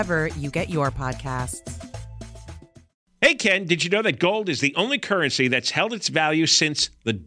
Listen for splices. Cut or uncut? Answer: cut